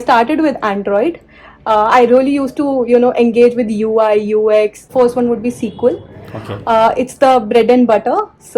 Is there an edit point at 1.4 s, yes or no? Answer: no